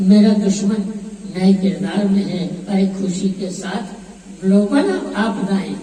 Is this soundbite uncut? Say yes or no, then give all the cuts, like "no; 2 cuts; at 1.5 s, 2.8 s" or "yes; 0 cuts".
yes; 0 cuts